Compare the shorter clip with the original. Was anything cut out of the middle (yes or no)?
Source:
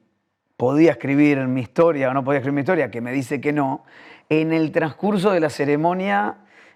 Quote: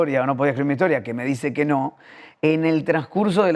no